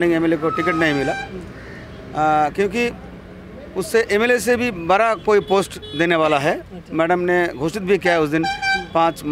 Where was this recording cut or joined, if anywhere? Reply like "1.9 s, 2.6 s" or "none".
none

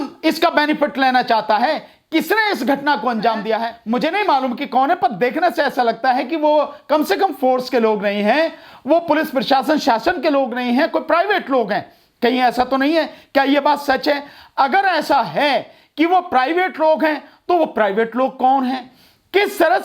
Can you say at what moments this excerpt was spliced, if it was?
3.8 s

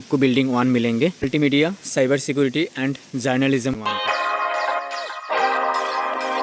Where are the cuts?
1.3 s, 3.8 s

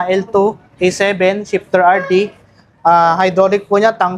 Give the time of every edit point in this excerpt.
none

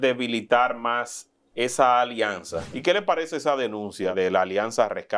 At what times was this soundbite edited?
2.7 s, 4.1 s

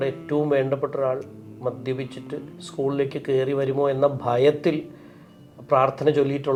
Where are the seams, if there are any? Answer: none

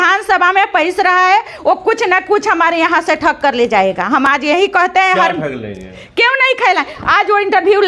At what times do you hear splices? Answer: none

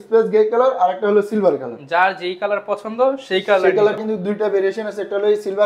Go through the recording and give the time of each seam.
4.0 s

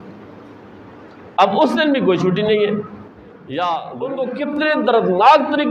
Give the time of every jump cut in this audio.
4.0 s

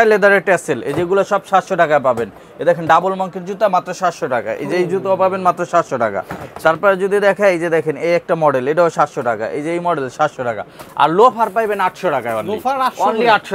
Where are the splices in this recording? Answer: none

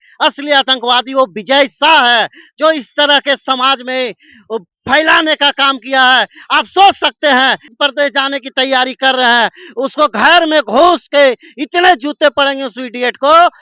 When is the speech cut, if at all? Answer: 7.7 s

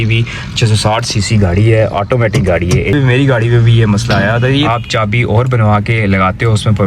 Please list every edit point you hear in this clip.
1.9 s, 2.9 s, 4.7 s

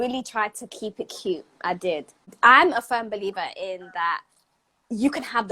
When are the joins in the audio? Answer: 2.3 s

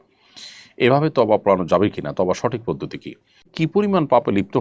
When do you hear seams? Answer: 3.4 s

